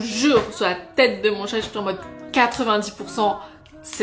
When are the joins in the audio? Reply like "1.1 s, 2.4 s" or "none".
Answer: none